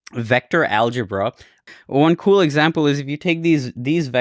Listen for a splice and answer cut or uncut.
cut